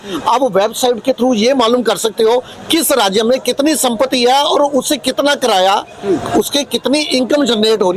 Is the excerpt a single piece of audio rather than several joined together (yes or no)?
yes